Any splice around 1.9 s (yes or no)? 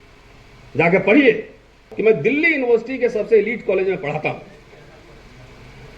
yes